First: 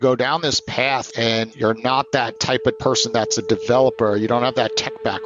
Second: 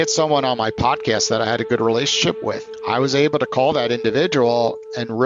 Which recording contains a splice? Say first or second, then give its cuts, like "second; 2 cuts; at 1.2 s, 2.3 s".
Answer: first; 2 cuts; at 1.4 s, 2.8 s